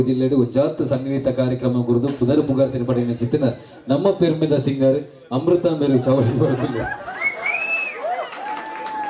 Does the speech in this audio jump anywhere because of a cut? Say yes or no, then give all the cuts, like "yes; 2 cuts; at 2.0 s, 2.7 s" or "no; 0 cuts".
no; 0 cuts